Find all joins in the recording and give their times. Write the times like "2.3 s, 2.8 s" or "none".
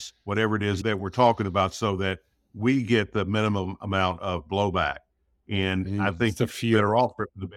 none